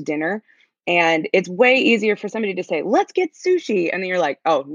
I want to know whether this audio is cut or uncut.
uncut